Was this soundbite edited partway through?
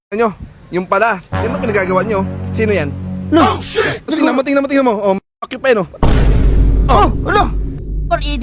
yes; 1 cut; at 4.1 s

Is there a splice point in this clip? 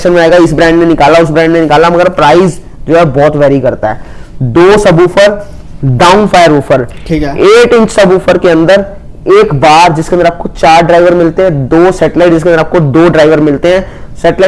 no; 0 cuts

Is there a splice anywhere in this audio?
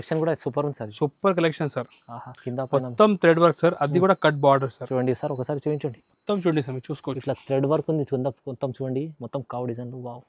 no; 0 cuts

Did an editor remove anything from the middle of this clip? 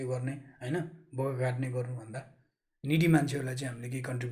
no; 0 cuts

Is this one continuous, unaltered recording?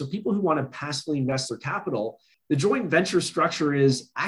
no; 1 cut; at 2.3 s

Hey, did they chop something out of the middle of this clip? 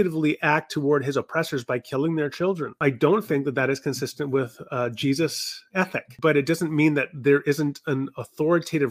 yes; 2 cuts; at 2.7 s, 6.0 s

